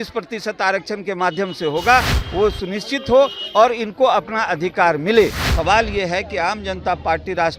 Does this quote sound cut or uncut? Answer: cut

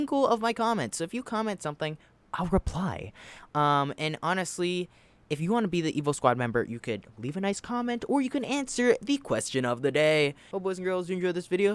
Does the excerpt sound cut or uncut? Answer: cut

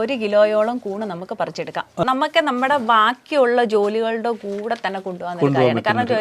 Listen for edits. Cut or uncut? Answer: cut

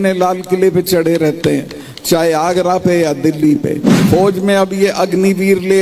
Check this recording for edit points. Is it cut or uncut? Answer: cut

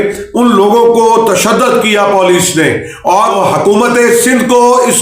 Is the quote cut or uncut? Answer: cut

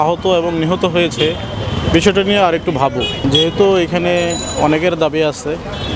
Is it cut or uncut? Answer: uncut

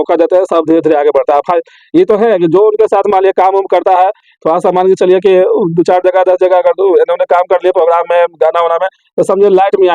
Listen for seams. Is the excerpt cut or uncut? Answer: uncut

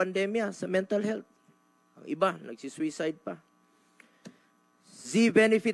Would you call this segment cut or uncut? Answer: uncut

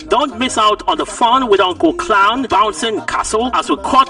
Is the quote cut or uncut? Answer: uncut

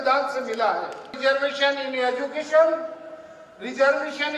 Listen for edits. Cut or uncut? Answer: cut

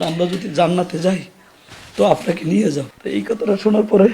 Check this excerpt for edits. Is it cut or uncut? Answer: cut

